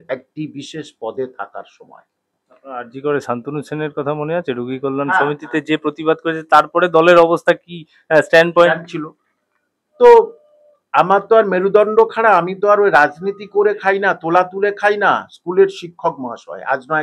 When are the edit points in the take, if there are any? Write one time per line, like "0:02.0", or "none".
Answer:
none

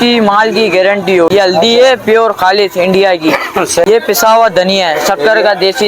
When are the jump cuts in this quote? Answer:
0:01.3
0:03.8

